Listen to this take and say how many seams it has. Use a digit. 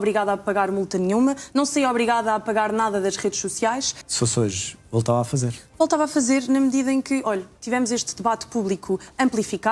1